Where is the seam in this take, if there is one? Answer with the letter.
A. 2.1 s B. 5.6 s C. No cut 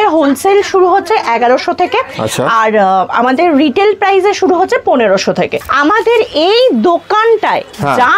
B